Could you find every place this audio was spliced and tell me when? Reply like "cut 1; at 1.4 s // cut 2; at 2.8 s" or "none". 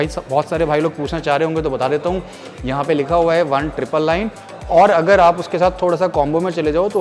none

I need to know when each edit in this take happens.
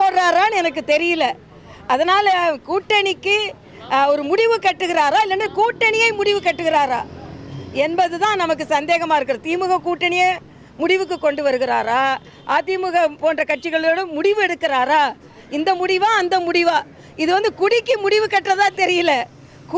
none

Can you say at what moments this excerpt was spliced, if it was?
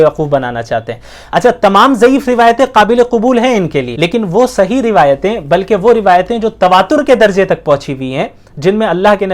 cut 1; at 3.9 s

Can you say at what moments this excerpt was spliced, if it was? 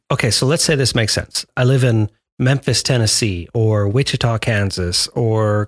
cut 1; at 1.5 s

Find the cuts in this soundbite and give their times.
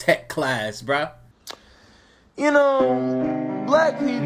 none

